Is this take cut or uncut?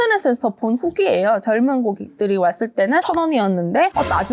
uncut